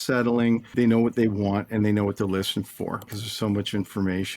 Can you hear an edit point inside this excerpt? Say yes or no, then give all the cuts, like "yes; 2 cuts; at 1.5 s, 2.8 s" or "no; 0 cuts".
yes; 2 cuts; at 0.7 s, 3.1 s